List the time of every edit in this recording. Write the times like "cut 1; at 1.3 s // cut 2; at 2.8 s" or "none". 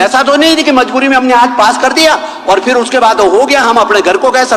none